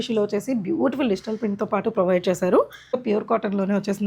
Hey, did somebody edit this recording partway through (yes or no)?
yes